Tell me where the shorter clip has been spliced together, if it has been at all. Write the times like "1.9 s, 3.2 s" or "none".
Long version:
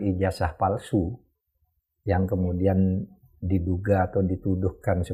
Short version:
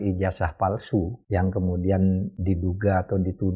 1.2 s, 2.3 s